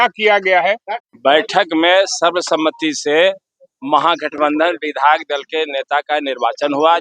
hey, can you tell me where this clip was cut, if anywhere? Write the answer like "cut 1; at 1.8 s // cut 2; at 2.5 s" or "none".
cut 1; at 1.0 s